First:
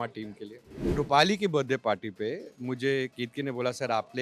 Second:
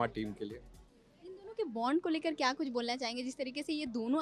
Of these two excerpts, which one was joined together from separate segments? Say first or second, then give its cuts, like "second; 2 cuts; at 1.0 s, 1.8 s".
first; 1 cut; at 0.9 s